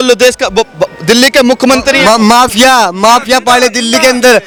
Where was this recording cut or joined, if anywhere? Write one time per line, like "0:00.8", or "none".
none